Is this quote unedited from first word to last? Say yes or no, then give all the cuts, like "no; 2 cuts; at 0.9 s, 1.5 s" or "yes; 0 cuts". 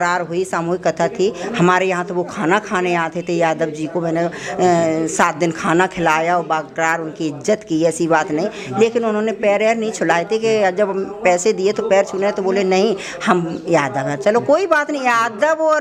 yes; 0 cuts